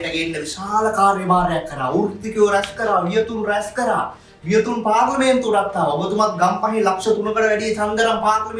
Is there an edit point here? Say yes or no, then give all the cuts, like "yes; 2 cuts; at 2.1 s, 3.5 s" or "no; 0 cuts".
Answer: no; 0 cuts